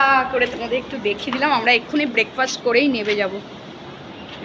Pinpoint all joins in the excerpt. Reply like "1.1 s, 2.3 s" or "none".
none